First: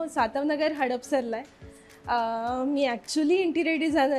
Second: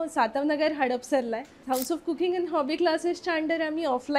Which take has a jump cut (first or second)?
second